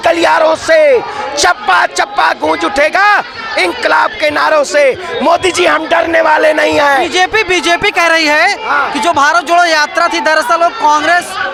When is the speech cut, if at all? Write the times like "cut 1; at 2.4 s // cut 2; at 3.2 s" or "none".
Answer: none

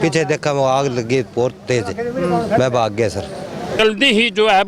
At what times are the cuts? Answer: cut 1; at 3.8 s

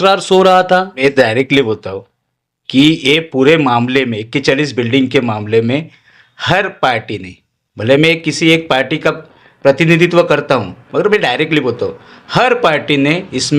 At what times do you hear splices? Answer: cut 1; at 0.9 s

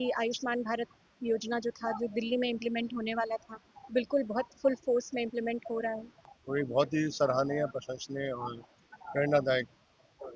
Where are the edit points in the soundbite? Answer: cut 1; at 6.3 s

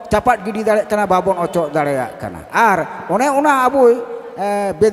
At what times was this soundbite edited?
none

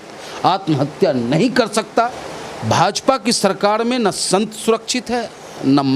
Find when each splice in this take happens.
cut 1; at 2.2 s

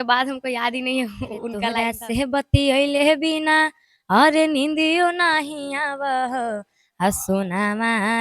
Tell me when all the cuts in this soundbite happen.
cut 1; at 1.7 s

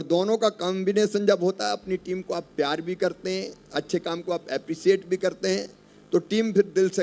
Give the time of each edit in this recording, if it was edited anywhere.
none

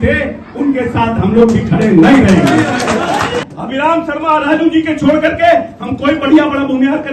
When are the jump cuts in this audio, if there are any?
cut 1; at 3.4 s

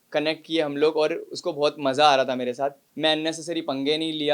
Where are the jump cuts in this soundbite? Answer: cut 1; at 2.8 s

